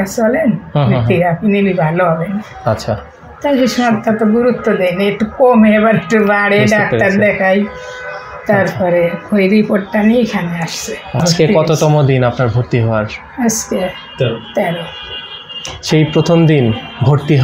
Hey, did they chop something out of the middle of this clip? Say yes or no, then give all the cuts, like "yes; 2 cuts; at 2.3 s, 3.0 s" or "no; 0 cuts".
yes; 1 cut; at 11.2 s